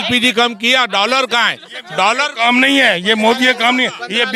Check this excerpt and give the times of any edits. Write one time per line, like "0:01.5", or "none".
none